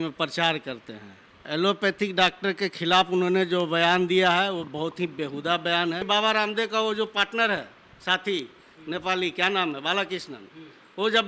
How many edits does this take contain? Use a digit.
2